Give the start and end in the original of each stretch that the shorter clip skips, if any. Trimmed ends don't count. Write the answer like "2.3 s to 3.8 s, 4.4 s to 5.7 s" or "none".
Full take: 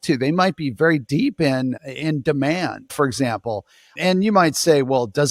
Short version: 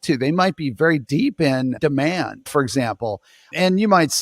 1.8 s to 2.2 s